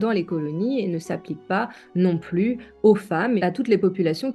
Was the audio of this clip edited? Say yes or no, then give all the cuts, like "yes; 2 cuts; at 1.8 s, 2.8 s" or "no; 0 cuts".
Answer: yes; 1 cut; at 3.4 s